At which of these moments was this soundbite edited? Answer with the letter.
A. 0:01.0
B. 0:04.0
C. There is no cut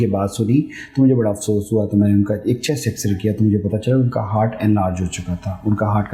C